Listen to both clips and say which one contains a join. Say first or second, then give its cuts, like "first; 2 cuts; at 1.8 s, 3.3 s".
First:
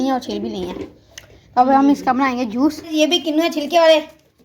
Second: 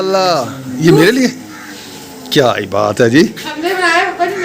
first; 1 cut; at 2.9 s